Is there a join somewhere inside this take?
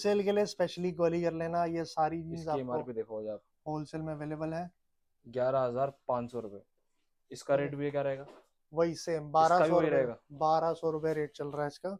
no; 0 cuts

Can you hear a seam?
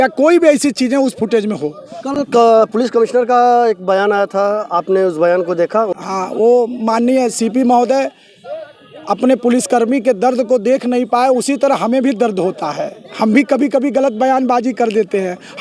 no; 0 cuts

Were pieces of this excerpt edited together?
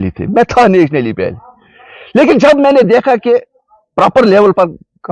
no; 0 cuts

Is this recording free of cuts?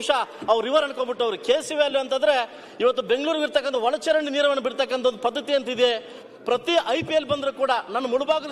no; 1 cut; at 6.2 s

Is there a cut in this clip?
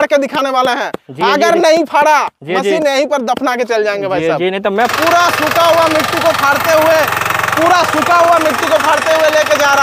yes; 1 cut; at 4.9 s

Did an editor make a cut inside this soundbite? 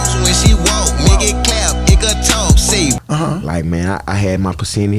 yes; 1 cut; at 3.0 s

